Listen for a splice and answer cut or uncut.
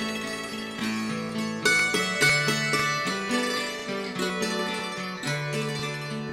uncut